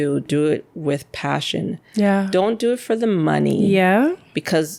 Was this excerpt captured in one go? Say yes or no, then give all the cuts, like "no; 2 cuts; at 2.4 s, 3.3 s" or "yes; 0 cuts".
yes; 0 cuts